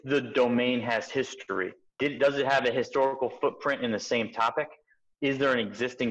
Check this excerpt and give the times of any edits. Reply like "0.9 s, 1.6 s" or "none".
1.9 s

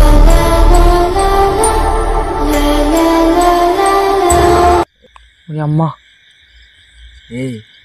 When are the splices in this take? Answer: none

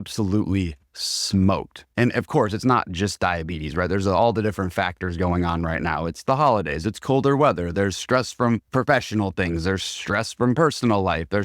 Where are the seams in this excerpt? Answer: 8.7 s

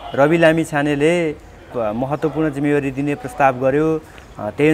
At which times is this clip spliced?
1.7 s

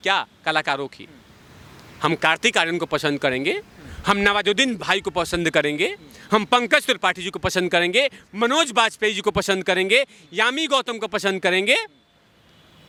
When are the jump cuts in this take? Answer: none

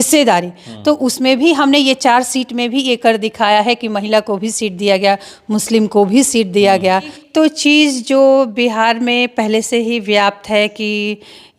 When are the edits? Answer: 7.2 s

